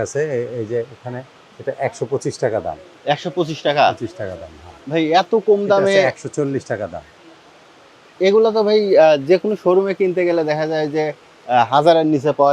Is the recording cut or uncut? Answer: uncut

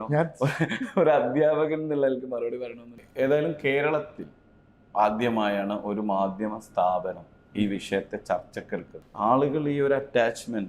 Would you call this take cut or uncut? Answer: cut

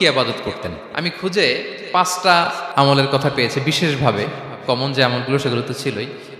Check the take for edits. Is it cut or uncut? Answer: cut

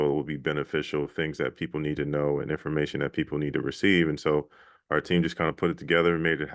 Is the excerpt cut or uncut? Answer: uncut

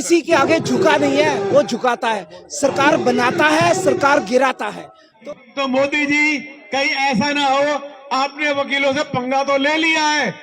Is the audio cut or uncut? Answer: cut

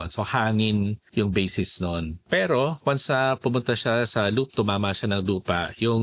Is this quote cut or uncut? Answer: cut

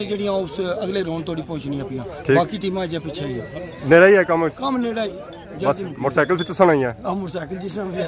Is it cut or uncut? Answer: uncut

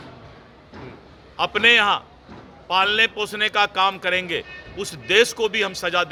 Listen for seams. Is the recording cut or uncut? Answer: uncut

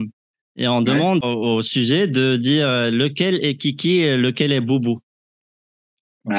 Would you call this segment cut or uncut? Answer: cut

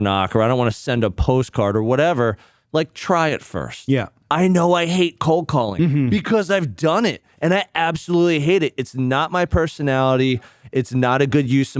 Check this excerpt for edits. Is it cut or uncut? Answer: uncut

